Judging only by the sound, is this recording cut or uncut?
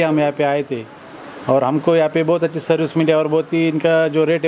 uncut